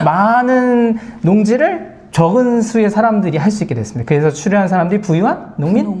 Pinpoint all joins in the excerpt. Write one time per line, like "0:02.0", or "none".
none

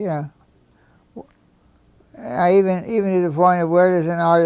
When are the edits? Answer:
0:03.4

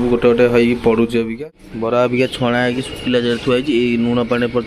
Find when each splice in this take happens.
0:01.4

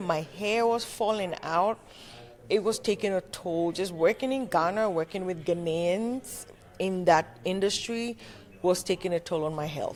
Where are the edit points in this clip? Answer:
none

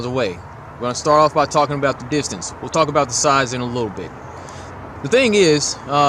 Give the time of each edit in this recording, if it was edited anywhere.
0:02.7

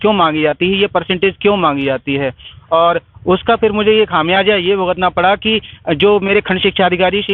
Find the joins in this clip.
none

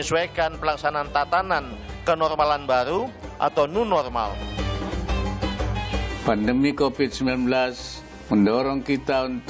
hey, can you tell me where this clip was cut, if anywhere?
none

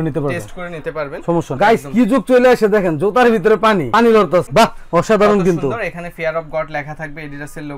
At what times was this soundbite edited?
0:01.6
0:04.5

